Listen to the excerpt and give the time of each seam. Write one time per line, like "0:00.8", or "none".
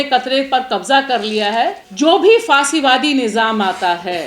0:01.8